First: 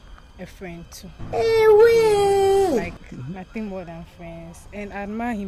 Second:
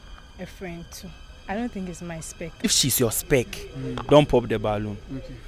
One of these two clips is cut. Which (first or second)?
second